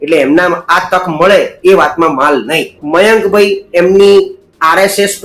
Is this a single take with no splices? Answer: no; 1 cut; at 2.7 s

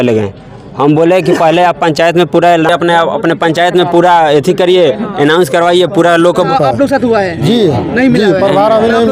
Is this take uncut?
no; 1 cut; at 6.5 s

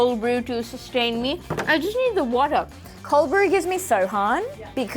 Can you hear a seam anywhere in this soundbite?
no; 0 cuts

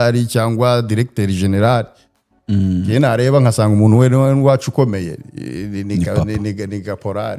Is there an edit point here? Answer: no; 0 cuts

